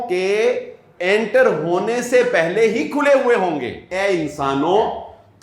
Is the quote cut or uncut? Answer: cut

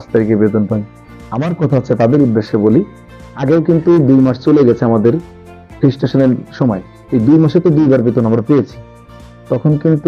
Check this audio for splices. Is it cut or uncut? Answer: uncut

